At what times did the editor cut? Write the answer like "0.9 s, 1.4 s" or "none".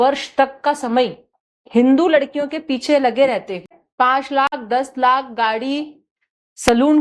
3.8 s